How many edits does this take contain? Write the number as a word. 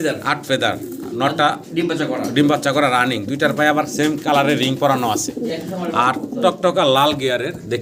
zero